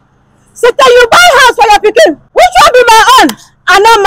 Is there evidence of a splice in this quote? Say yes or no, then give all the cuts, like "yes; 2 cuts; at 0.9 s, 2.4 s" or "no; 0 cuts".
yes; 1 cut; at 2.2 s